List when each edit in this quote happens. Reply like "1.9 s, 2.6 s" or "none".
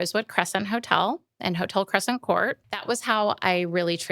2.7 s

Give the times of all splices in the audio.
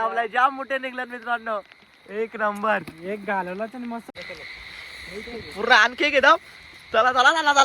4.1 s

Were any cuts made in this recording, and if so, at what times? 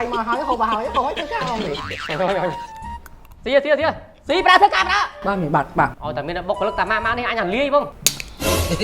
1.8 s, 6.0 s, 7.9 s

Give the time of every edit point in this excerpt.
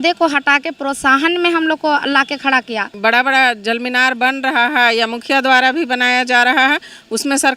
2.9 s

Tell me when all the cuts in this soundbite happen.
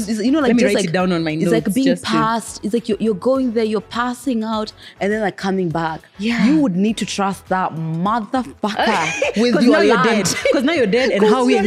none

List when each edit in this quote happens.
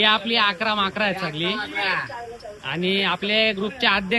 none

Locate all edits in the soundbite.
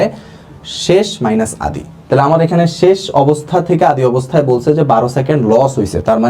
none

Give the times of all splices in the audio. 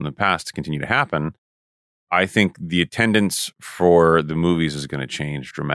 none

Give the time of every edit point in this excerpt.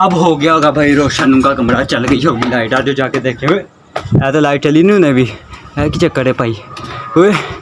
none

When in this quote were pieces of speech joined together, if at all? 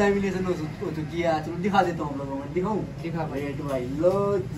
none

